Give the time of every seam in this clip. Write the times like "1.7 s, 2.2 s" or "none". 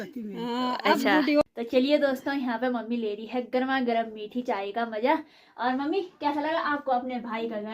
1.4 s